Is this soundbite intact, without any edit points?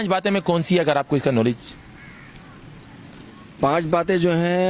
yes; 0 cuts

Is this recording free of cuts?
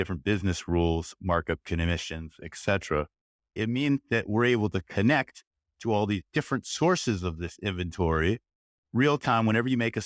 no; 1 cut; at 3.6 s

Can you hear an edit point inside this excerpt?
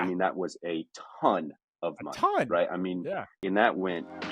yes; 1 cut; at 3.3 s

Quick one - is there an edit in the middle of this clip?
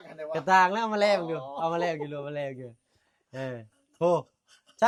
no; 0 cuts

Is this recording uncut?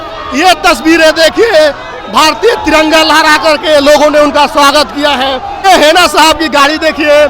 no; 1 cut; at 5.6 s

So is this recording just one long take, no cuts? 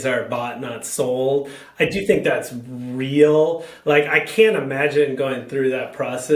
yes; 0 cuts

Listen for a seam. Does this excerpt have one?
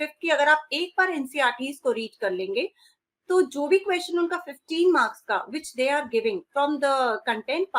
no; 0 cuts

